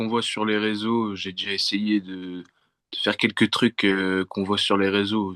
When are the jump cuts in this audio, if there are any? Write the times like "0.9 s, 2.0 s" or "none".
none